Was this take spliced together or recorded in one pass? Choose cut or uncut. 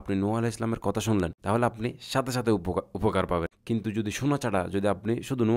cut